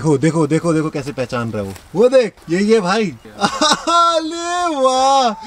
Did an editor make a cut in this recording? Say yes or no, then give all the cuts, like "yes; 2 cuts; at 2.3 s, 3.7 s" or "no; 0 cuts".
yes; 2 cuts; at 2.4 s, 3.2 s